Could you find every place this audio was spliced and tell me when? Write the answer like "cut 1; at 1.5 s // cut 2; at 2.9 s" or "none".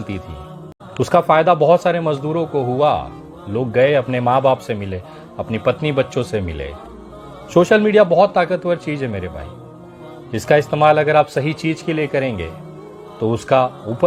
none